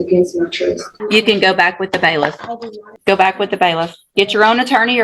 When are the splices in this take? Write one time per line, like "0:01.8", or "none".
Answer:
0:00.9
0:02.9